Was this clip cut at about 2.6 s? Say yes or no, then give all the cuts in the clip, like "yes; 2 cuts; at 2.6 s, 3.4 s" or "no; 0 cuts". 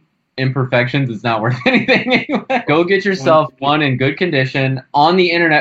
yes; 1 cut; at 2.6 s